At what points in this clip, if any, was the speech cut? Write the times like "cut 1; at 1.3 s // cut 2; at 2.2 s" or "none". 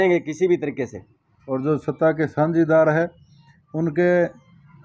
cut 1; at 1.3 s